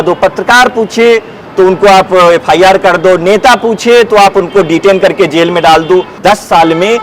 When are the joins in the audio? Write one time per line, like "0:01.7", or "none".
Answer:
0:06.1

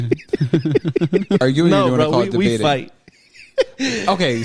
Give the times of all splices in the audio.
0:01.4

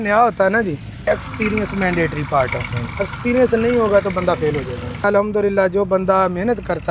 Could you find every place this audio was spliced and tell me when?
0:01.1
0:05.0

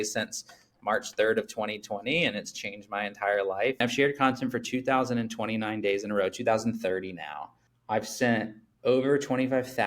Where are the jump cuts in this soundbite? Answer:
0:03.8

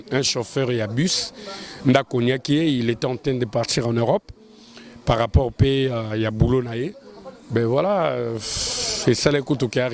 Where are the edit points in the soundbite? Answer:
none

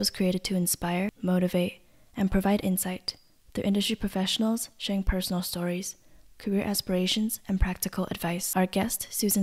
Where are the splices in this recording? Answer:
0:01.2
0:08.5

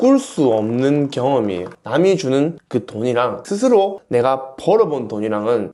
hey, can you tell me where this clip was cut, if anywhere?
0:01.7

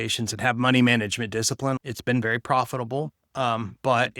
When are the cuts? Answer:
0:01.8

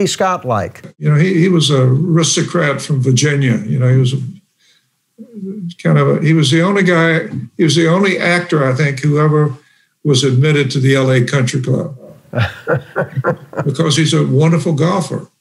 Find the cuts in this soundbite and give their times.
0:00.9

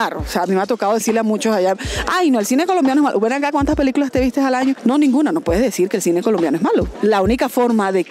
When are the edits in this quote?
0:04.8
0:06.9

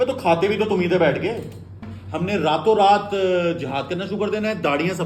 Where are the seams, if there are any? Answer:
0:01.9

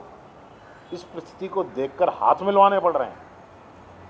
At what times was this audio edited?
none

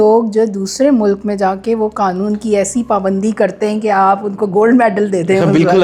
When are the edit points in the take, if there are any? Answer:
none

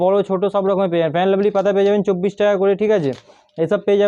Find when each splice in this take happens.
none

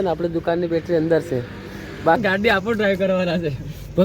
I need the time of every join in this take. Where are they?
0:02.2

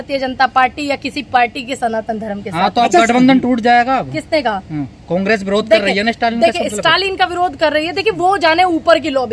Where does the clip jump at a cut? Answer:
none

